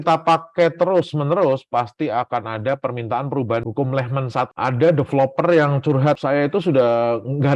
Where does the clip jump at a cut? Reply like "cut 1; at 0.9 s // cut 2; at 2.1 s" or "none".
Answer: cut 1; at 3.6 s // cut 2; at 4.5 s // cut 3; at 6.2 s